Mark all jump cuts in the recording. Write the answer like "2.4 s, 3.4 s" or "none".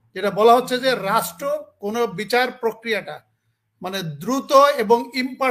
none